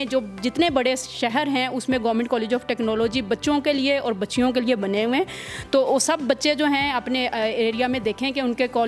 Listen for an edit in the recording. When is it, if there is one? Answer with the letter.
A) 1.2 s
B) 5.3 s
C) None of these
C